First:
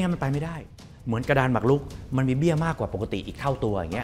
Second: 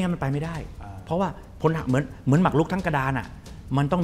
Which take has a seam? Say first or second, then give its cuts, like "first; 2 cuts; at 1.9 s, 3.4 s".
first; 1 cut; at 0.9 s